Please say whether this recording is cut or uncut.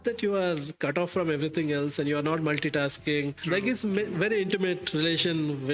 cut